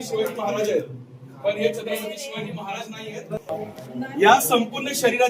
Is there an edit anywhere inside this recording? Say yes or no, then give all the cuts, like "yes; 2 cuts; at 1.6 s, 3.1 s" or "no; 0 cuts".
yes; 1 cut; at 3.4 s